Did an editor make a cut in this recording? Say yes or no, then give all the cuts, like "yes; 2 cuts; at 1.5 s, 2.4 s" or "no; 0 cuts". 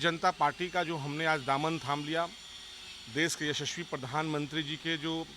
no; 0 cuts